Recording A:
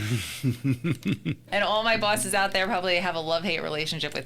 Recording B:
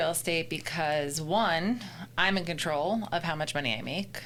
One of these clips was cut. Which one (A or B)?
A